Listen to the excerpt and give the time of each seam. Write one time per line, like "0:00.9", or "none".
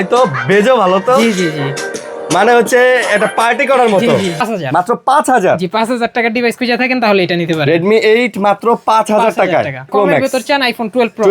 0:04.4
0:09.9